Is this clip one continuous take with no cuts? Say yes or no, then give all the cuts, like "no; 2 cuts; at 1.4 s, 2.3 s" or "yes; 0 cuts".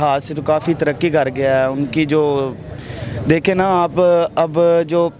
yes; 0 cuts